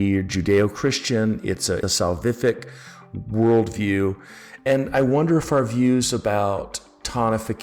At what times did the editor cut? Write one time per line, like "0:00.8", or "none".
0:01.8
0:04.6